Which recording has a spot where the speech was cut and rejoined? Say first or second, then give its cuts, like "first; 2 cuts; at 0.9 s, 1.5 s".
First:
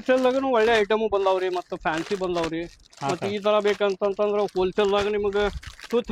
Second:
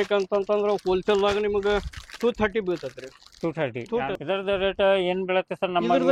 second; 1 cut; at 4.2 s